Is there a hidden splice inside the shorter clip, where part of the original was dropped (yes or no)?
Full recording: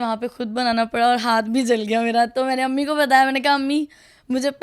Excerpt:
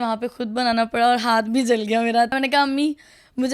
yes